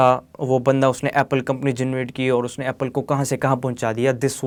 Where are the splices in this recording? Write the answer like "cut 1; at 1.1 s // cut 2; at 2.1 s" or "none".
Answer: none